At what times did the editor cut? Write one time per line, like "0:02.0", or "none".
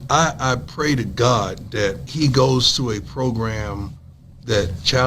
0:02.0